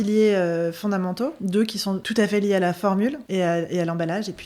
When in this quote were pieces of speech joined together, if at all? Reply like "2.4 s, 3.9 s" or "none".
1.4 s, 3.2 s